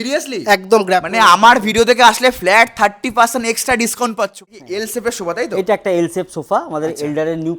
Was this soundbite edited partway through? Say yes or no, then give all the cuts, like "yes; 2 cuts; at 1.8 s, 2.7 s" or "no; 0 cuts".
yes; 1 cut; at 4.5 s